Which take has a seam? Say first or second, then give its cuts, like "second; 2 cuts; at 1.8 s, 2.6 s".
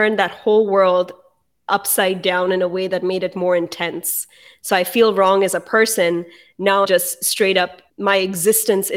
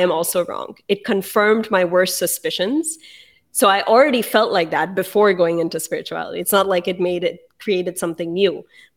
first; 2 cuts; at 6.9 s, 7.8 s